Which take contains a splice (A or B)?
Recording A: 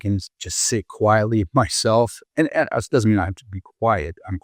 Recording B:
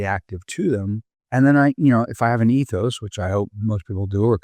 B